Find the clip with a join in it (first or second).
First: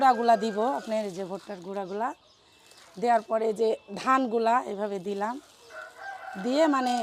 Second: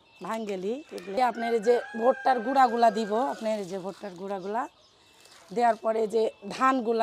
second